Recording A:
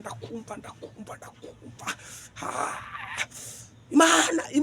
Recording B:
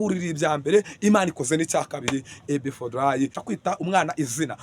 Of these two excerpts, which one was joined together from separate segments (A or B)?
B